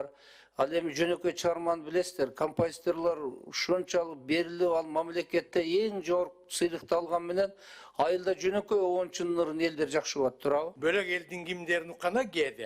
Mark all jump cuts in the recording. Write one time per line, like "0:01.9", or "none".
0:10.7